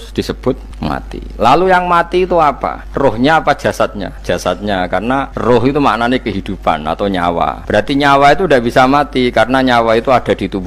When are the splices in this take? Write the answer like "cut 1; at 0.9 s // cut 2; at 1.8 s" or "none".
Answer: cut 1; at 2.8 s // cut 2; at 4.1 s // cut 3; at 5.3 s // cut 4; at 7.6 s